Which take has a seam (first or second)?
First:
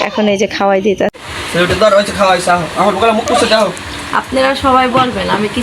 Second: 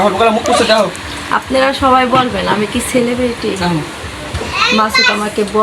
first